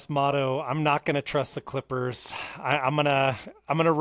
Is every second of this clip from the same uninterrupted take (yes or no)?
yes